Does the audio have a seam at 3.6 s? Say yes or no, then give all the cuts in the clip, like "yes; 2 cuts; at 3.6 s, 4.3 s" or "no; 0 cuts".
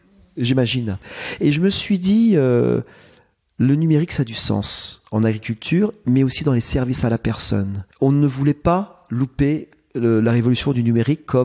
no; 2 cuts; at 1.2 s, 7.8 s